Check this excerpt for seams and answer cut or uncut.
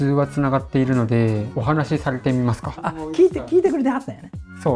cut